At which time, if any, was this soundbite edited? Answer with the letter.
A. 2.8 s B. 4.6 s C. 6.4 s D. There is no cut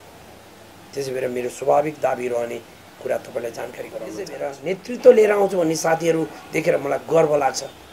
B